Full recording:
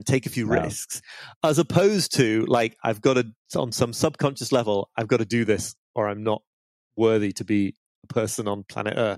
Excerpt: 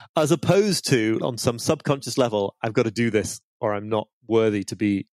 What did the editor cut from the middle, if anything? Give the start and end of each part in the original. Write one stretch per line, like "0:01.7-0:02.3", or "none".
0:02.5-0:03.5
0:06.5-0:06.8